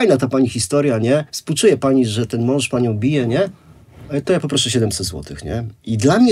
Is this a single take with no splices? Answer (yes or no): yes